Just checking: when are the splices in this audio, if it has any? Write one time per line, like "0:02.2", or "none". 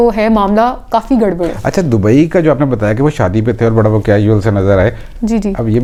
none